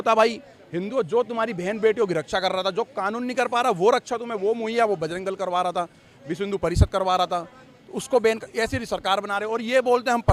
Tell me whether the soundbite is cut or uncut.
uncut